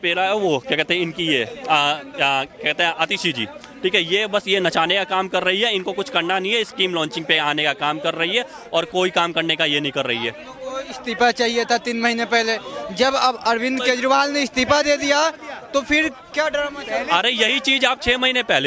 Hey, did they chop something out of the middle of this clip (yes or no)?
no